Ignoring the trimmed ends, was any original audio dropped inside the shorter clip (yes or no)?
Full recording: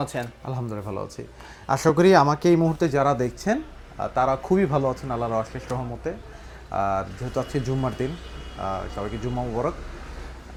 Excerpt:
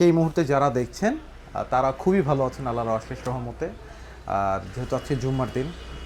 no